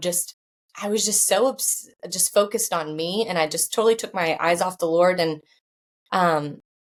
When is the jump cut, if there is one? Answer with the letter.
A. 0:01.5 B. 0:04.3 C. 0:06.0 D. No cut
D